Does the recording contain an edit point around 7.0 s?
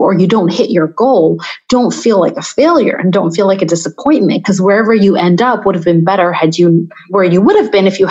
yes; 1 cut; at 7.0 s

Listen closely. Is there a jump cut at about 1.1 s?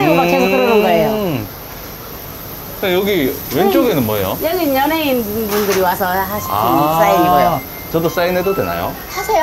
no; 0 cuts

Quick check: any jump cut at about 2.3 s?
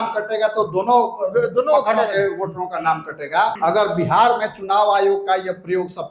no; 1 cut; at 3.5 s

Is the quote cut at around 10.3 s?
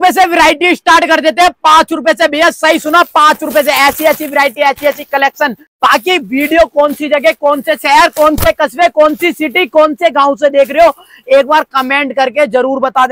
no; 1 cut; at 5.6 s

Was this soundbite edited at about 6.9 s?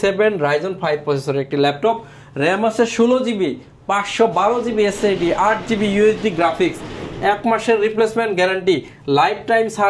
no; 0 cuts

